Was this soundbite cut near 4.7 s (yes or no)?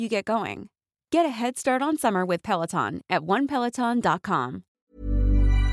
yes